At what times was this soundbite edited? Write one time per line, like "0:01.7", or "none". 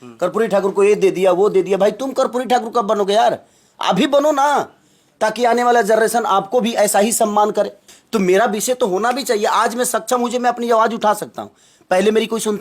0:07.9